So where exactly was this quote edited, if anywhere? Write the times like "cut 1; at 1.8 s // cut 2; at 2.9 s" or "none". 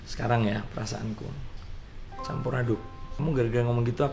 cut 1; at 1.4 s // cut 2; at 3.0 s